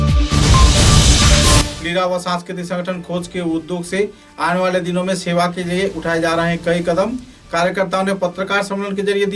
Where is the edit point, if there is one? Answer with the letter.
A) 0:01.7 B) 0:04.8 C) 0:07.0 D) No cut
A